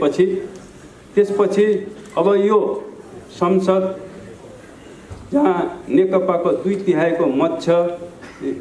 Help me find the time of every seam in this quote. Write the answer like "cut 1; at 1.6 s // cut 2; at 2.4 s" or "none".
none